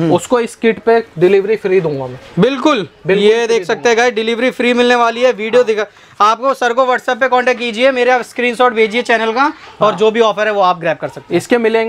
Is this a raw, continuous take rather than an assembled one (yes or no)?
yes